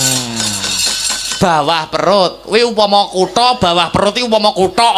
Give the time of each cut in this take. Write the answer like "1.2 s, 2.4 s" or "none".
1.4 s